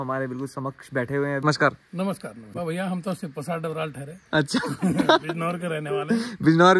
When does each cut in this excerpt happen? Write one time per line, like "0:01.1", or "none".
0:01.4
0:02.5